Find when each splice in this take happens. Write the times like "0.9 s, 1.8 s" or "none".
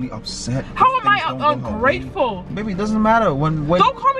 2.6 s